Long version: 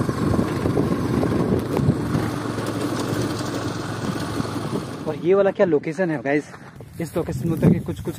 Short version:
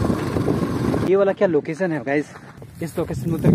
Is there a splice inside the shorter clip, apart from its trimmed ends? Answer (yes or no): yes